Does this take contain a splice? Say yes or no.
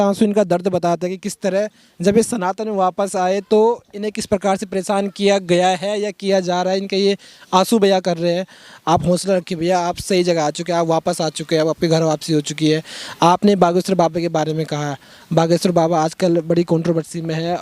no